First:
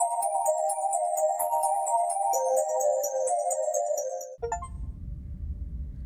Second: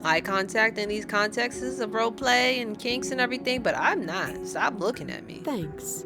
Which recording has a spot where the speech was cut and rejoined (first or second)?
first